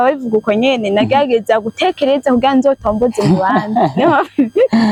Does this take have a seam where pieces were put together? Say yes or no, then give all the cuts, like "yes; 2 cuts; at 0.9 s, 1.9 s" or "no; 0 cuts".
no; 0 cuts